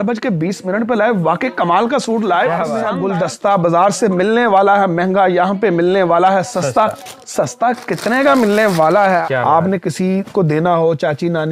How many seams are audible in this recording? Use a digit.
2